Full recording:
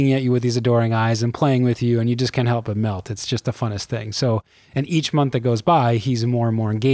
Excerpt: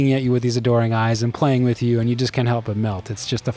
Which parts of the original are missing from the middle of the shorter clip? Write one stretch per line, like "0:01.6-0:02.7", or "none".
none